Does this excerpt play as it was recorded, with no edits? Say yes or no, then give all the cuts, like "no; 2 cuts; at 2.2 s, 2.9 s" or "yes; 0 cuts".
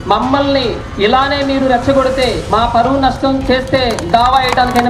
no; 2 cuts; at 0.8 s, 2.4 s